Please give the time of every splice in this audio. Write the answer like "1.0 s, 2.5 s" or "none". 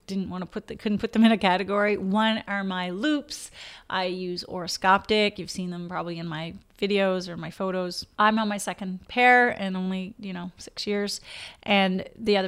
none